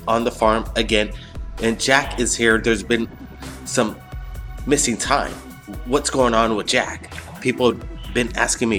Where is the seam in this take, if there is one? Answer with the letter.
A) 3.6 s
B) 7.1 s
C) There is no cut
A